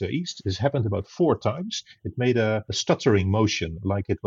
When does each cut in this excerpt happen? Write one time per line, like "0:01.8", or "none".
0:02.7